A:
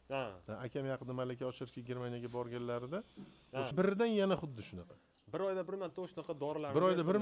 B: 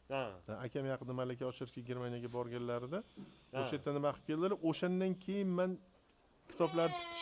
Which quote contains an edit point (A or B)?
A